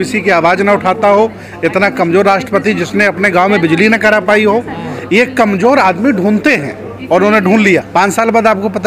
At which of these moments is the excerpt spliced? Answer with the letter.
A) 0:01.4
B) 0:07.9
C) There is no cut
B